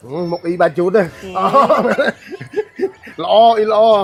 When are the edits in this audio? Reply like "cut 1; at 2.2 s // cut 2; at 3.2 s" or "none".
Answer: none